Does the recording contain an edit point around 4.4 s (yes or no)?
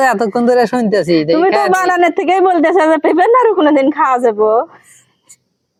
no